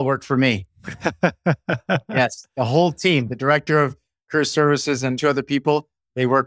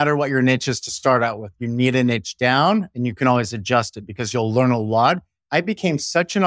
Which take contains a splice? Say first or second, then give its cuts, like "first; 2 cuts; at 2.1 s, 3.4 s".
first; 1 cut; at 5.2 s